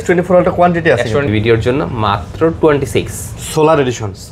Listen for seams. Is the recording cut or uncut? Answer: cut